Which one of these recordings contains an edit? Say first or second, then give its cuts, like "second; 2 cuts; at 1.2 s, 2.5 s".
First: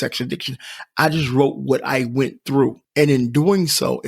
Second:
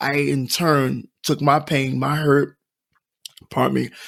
first; 1 cut; at 2.8 s